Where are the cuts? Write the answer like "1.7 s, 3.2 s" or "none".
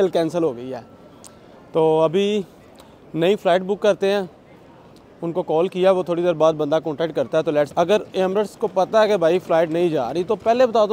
7.7 s